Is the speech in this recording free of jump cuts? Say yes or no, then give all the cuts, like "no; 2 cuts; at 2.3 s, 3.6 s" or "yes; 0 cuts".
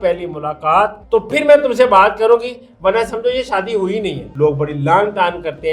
no; 2 cuts; at 1.0 s, 4.2 s